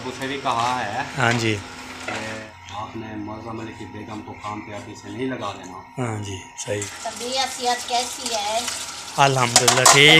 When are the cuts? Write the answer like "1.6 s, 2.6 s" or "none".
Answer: 2.5 s, 7.0 s